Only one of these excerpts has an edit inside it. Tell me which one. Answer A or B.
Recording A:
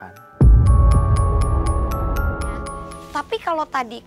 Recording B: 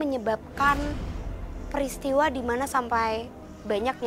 A